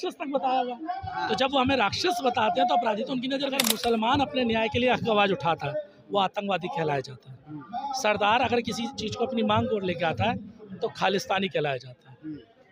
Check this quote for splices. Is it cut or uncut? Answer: cut